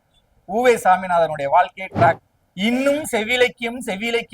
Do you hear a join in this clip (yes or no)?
yes